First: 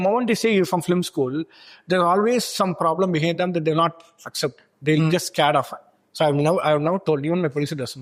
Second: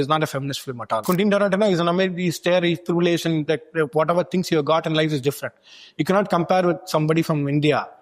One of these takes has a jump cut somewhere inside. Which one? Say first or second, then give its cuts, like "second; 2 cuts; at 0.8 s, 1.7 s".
second; 1 cut; at 1.0 s